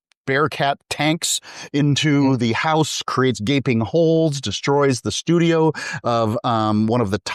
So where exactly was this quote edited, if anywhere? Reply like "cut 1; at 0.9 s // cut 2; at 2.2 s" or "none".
none